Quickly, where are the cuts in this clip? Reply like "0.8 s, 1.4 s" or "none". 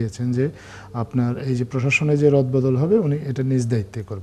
none